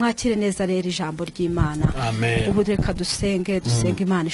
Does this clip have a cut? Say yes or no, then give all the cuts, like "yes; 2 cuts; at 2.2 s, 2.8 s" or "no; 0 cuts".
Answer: no; 0 cuts